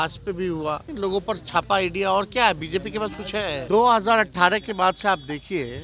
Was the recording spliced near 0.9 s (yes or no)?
yes